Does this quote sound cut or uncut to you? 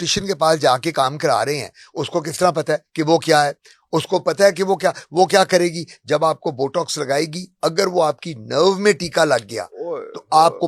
uncut